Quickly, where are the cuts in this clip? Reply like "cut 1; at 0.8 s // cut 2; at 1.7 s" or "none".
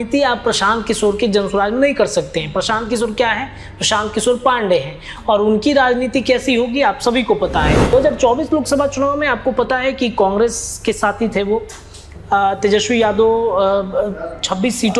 cut 1; at 7.9 s